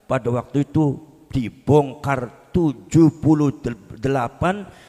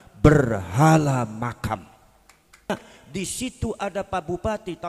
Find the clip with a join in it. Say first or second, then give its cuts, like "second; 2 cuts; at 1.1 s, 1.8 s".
second; 1 cut; at 2.7 s